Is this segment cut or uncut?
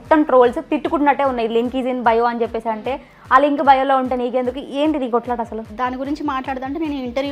cut